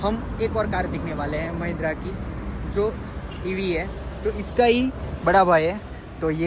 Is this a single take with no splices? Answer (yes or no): yes